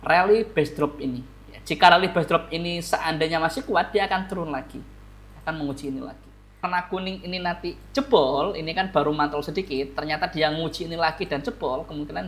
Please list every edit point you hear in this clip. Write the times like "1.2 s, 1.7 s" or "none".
6.7 s